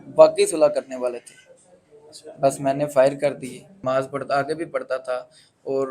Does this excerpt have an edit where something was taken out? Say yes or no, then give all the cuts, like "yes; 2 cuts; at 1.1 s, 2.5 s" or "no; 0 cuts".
yes; 1 cut; at 3.7 s